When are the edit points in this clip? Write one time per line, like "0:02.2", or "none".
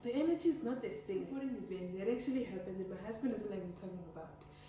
0:01.6